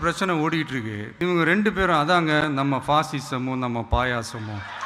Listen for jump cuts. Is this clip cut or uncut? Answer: cut